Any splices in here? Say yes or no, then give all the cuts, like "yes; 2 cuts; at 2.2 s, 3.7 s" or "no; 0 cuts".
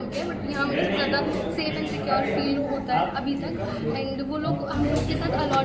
no; 0 cuts